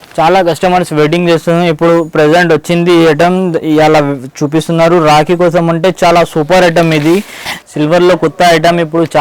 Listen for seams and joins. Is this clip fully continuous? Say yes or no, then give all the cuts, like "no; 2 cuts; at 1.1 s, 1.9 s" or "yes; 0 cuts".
no; 1 cut; at 7.5 s